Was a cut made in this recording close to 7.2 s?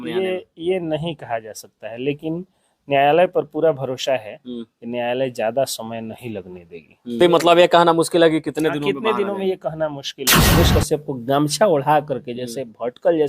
yes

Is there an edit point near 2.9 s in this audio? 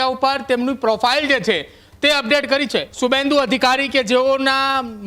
yes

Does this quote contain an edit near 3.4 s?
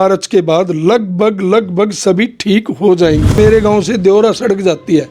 yes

